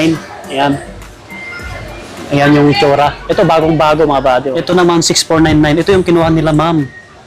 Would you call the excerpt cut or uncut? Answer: cut